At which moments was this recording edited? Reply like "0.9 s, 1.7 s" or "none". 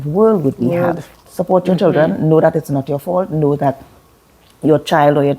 1.2 s